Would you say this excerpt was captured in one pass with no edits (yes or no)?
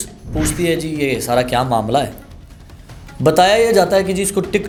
yes